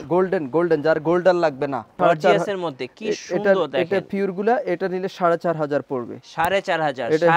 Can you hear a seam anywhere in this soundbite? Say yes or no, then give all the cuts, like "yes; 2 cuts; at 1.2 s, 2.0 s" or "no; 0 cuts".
yes; 1 cut; at 1.9 s